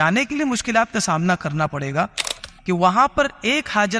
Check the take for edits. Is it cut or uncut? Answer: cut